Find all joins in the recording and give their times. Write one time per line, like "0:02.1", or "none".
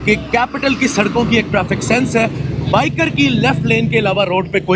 none